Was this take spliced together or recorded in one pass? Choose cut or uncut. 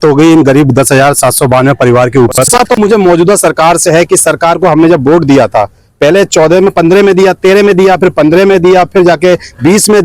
cut